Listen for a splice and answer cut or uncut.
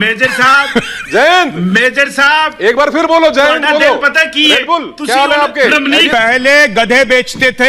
cut